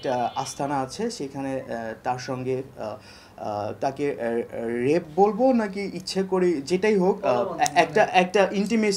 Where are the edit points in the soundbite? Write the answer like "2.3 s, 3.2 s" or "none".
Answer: none

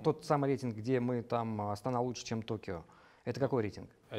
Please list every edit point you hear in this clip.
none

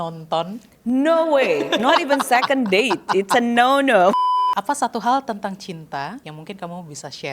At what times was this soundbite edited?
4.1 s, 6.3 s

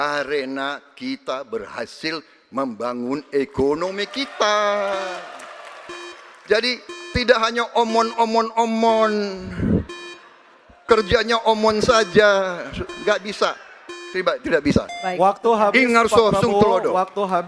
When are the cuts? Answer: none

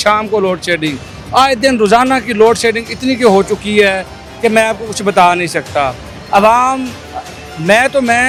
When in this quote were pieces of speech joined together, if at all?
none

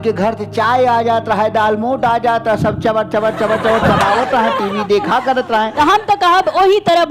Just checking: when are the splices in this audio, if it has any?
5.7 s

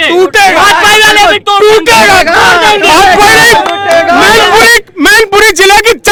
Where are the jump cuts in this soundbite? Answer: none

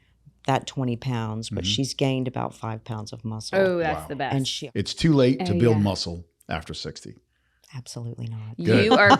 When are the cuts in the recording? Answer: 4.6 s

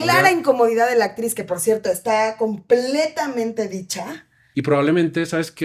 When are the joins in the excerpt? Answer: 4.3 s

